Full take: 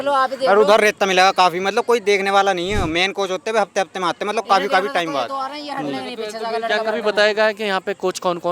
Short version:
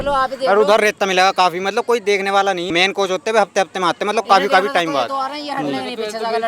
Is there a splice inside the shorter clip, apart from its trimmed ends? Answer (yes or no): yes